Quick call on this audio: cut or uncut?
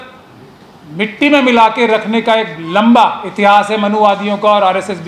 uncut